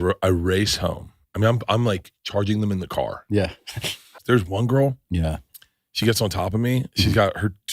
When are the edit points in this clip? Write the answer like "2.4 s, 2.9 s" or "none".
4.2 s